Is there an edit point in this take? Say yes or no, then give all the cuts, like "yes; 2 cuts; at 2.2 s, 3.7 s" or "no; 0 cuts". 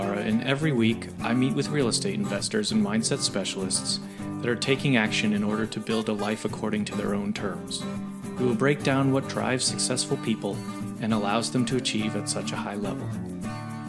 no; 0 cuts